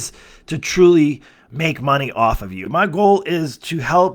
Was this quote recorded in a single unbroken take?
no; 1 cut; at 2.6 s

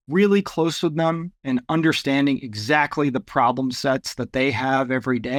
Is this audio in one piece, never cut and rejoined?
yes; 0 cuts

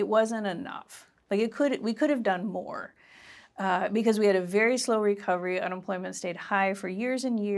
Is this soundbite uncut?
yes; 0 cuts

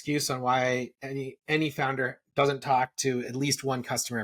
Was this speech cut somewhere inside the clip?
no; 0 cuts

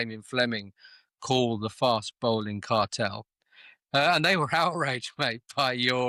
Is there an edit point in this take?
no; 0 cuts

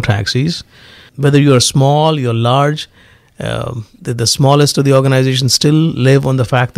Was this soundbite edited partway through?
yes; 1 cut; at 1.1 s

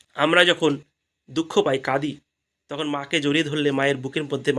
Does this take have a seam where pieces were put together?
no; 0 cuts

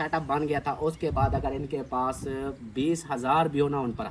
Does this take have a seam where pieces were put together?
no; 0 cuts

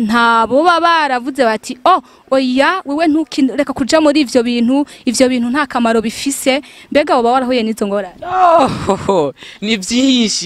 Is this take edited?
no; 0 cuts

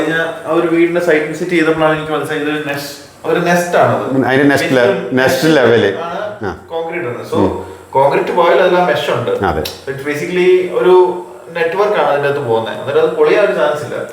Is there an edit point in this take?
no; 0 cuts

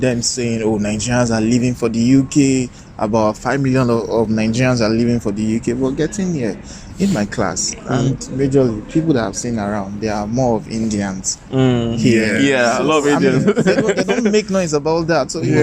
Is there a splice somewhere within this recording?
no; 0 cuts

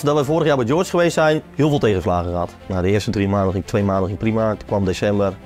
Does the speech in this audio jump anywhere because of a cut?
yes; 2 cuts; at 1.5 s, 2.6 s

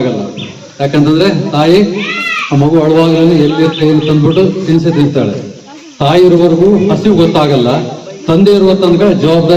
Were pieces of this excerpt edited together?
no; 0 cuts

